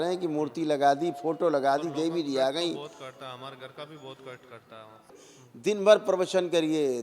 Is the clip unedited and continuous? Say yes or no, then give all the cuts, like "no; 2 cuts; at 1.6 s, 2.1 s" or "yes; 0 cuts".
no; 1 cut; at 5.1 s